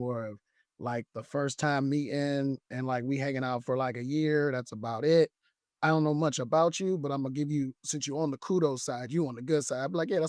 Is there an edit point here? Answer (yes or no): no